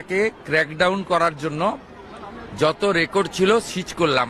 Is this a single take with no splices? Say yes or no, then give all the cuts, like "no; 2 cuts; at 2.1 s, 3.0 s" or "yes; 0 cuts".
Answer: yes; 0 cuts